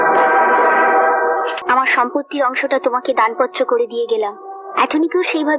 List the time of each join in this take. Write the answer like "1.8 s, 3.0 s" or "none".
1.6 s